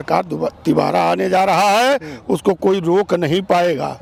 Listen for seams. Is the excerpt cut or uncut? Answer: uncut